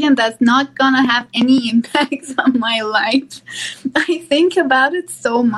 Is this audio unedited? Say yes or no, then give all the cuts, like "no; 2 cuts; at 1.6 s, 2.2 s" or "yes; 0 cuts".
yes; 0 cuts